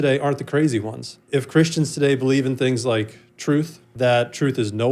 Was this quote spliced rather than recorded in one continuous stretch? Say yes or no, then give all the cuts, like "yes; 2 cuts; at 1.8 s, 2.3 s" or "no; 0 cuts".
yes; 2 cuts; at 1.1 s, 3.9 s